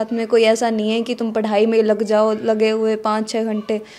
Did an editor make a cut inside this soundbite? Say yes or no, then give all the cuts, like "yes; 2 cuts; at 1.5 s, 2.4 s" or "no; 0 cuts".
no; 0 cuts